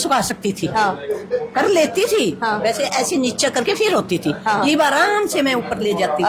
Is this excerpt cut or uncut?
uncut